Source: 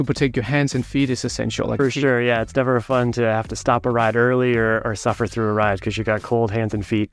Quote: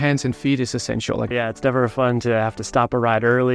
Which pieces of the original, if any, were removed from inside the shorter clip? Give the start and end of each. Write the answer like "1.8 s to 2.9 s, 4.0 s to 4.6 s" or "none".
1.8 s to 2.2 s